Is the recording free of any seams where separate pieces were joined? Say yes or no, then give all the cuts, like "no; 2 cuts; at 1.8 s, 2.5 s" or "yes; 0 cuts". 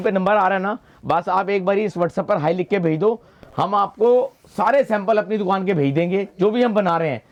yes; 0 cuts